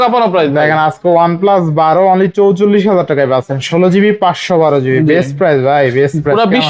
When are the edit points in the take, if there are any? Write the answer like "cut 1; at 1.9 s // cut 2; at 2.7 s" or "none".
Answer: none